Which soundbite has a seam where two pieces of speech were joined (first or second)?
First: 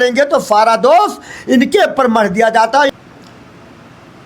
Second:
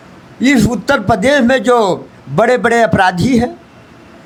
first